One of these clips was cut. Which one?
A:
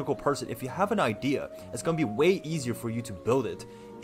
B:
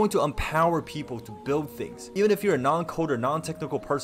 B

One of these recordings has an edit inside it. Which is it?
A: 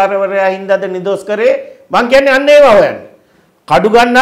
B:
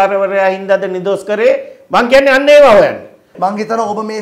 B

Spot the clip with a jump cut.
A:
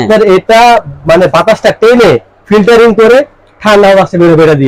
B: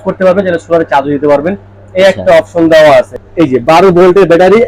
B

